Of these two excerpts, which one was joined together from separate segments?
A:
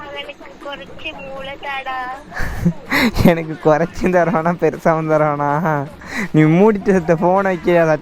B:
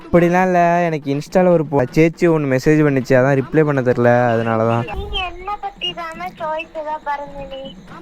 B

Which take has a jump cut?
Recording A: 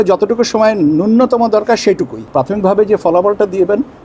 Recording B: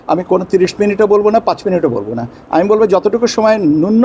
A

